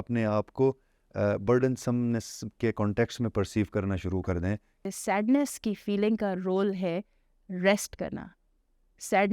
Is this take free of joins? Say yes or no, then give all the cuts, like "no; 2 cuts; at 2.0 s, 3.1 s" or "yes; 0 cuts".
no; 1 cut; at 4.9 s